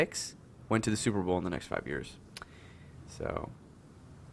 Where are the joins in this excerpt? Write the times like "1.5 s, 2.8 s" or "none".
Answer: 1.1 s